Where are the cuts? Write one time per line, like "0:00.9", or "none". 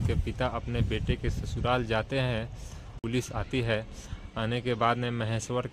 0:02.9